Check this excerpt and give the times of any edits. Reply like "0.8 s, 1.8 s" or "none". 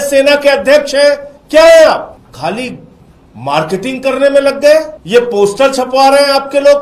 2.2 s, 5.0 s